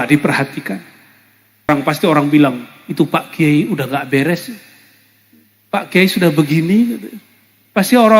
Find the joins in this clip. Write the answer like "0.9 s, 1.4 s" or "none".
1.7 s